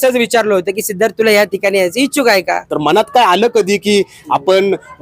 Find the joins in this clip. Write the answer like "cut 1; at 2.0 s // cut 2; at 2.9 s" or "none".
cut 1; at 2.7 s